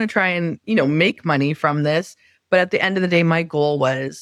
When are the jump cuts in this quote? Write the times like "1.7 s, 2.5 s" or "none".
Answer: none